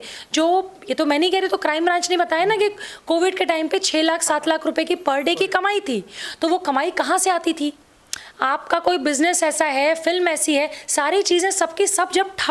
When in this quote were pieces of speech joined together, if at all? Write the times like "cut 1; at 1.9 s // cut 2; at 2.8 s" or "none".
none